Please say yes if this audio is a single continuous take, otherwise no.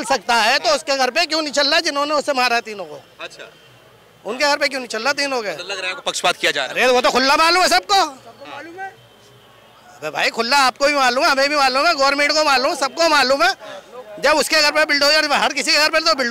yes